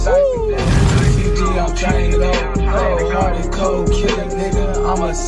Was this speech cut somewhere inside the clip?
no; 0 cuts

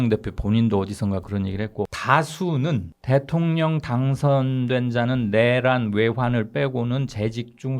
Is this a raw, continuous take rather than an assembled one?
no; 2 cuts; at 2.0 s, 2.9 s

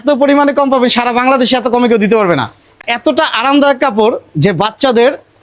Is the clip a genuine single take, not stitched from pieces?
no; 1 cut; at 2.8 s

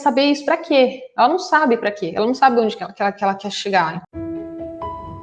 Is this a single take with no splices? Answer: no; 1 cut; at 4.1 s

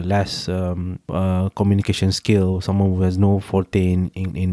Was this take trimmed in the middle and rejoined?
yes; 1 cut; at 1.0 s

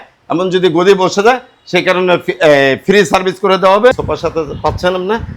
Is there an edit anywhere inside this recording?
yes; 1 cut; at 4.0 s

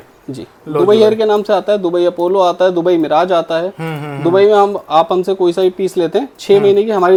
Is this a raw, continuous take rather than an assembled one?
yes; 0 cuts

